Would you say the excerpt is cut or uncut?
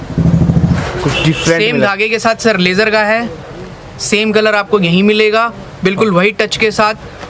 uncut